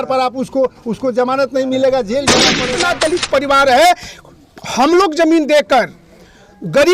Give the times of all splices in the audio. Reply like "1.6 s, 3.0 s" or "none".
2.6 s

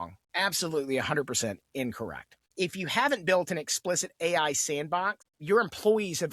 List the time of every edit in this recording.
none

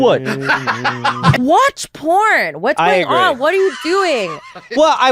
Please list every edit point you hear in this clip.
1.3 s

